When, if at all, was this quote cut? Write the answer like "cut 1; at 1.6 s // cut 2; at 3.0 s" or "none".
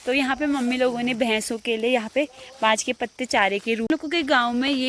cut 1; at 3.9 s